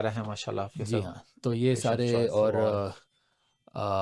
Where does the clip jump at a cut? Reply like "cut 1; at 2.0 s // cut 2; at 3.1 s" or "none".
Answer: none